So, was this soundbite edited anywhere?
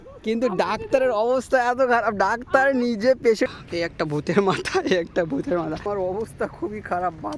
yes; 2 cuts; at 3.5 s, 5.8 s

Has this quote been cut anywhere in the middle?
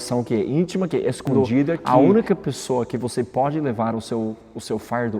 yes; 1 cut; at 1.8 s

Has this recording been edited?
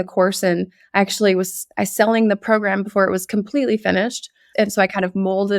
no; 0 cuts

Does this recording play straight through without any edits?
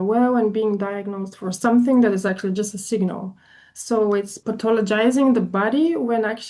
no; 1 cut; at 4.4 s

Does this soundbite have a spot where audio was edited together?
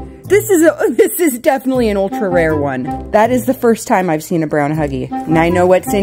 yes; 2 cuts; at 3.0 s, 5.1 s

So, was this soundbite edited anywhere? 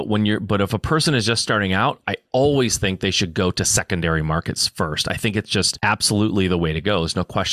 yes; 1 cut; at 5.7 s

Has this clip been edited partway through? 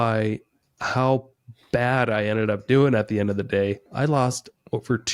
no; 0 cuts

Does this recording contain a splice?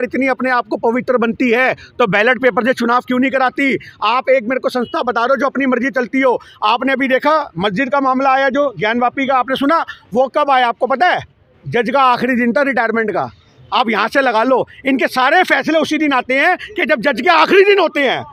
no; 0 cuts

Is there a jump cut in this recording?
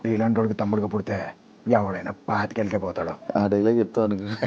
yes; 1 cut; at 3.2 s

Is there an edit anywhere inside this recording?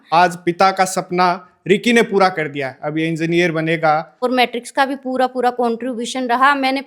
yes; 1 cut; at 4.1 s

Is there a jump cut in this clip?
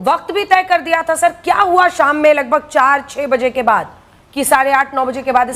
no; 0 cuts

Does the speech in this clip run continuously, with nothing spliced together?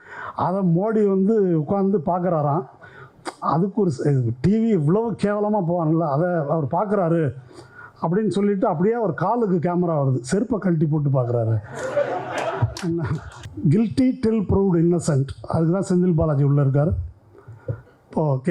no; 1 cut; at 13.4 s

